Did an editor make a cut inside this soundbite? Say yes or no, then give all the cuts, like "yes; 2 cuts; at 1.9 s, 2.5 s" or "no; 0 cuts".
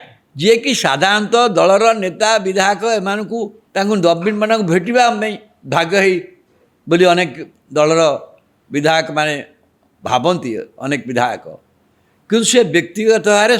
yes; 1 cut; at 3.6 s